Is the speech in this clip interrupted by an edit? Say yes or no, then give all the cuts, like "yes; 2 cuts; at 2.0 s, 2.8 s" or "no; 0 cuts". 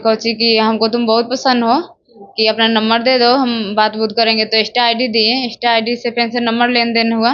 no; 0 cuts